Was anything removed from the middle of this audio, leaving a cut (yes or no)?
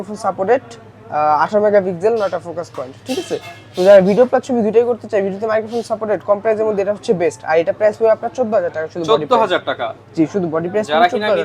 no